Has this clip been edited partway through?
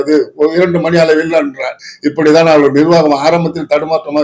yes; 1 cut; at 1.8 s

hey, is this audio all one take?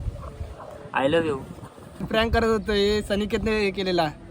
no; 1 cut; at 2.0 s

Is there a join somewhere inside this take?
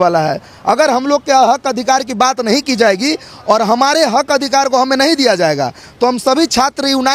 no; 0 cuts

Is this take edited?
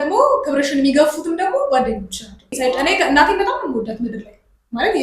yes; 1 cut; at 2.5 s

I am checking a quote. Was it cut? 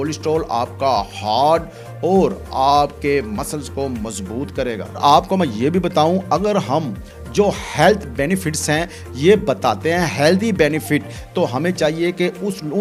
no; 0 cuts

